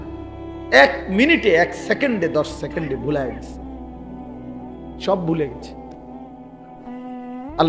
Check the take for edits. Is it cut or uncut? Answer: cut